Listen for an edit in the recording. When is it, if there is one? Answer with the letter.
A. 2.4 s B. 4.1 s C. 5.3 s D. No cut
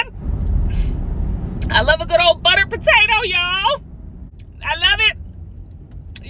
D